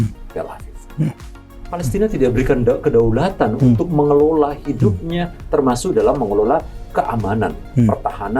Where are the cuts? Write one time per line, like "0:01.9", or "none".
0:01.5